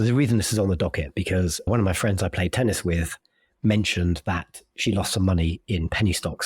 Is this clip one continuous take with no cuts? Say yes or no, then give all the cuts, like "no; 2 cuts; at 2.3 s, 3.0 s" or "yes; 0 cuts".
no; 1 cut; at 1.7 s